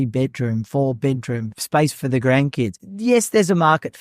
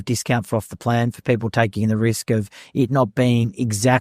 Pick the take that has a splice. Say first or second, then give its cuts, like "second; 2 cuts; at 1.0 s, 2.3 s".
first; 2 cuts; at 1.5 s, 2.8 s